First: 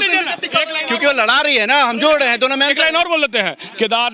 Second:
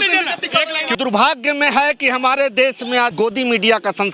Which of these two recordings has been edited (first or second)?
second